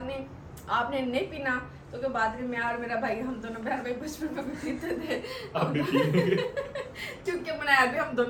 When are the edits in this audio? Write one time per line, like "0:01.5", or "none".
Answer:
none